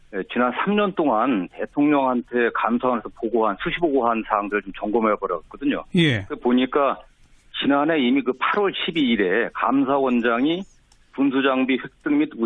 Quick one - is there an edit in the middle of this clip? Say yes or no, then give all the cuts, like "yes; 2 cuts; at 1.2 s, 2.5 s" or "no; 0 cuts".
no; 0 cuts